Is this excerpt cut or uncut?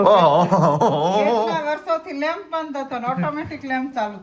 uncut